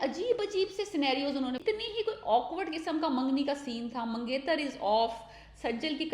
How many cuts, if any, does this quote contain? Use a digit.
1